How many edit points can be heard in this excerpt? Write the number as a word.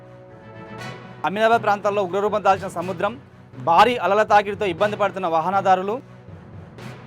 one